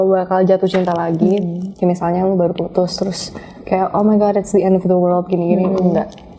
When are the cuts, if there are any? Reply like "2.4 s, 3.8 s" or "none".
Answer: none